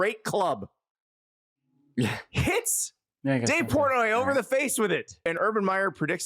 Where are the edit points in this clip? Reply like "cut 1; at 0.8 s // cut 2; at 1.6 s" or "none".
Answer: cut 1; at 5.2 s